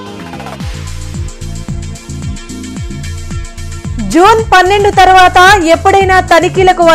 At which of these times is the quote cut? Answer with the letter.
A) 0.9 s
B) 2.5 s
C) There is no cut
A